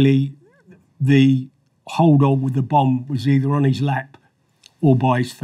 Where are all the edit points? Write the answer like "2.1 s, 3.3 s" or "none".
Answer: none